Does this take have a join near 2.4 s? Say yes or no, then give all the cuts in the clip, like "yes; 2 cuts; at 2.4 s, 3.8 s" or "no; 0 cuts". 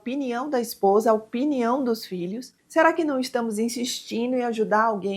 yes; 1 cut; at 2.4 s